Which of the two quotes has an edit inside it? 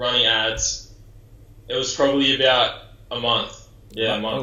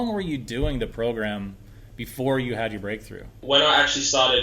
second; 1 cut; at 3.4 s

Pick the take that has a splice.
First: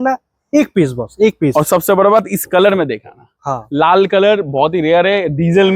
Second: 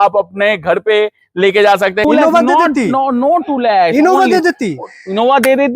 second; 1 cut; at 2.0 s

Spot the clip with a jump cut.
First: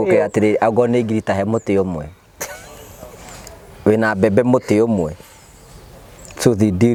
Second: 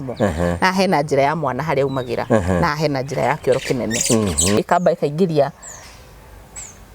second; 1 cut; at 4.6 s

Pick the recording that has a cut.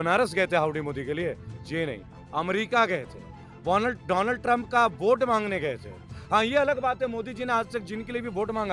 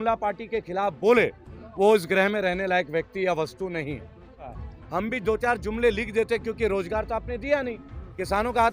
second; 1 cut; at 4.5 s

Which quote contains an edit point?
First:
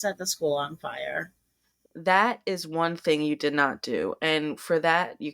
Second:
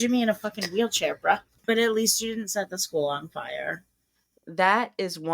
second; 1 cut; at 1.5 s

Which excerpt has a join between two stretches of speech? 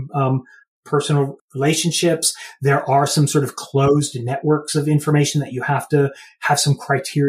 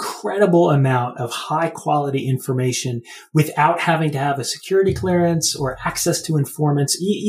first; 1 cut; at 1.4 s

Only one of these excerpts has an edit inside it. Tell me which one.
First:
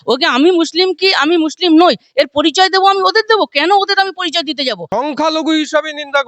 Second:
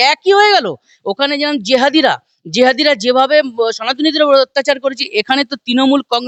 first; 1 cut; at 4.8 s

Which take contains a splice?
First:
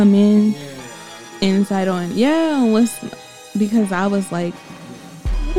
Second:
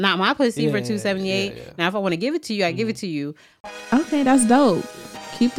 second; 1 cut; at 3.5 s

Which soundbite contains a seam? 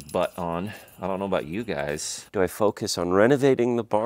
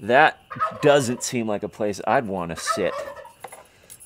first; 1 cut; at 2.3 s

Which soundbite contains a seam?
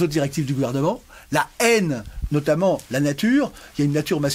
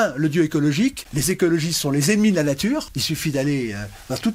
second; 2 cuts; at 1.1 s, 2.9 s

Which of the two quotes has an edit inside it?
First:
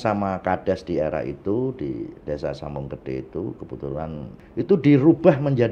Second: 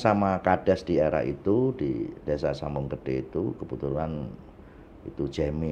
first; 1 cut; at 4.3 s

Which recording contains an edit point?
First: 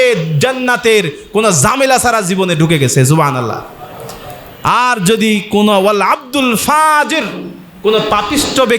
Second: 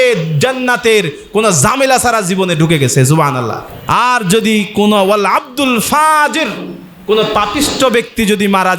second; 1 cut; at 3.7 s

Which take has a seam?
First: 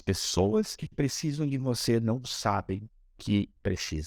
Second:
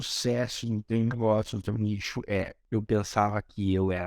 second; 1 cut; at 2.6 s

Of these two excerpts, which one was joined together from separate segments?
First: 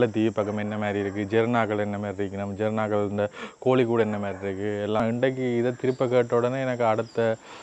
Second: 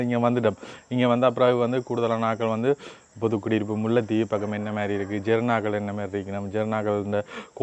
first; 1 cut; at 5.0 s

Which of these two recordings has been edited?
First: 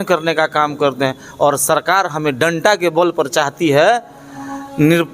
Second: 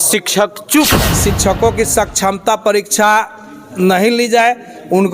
second; 1 cut; at 1.1 s

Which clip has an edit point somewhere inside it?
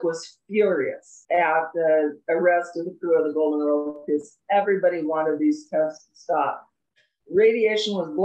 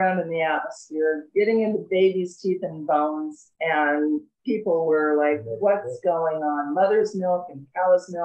first; 1 cut; at 1.1 s

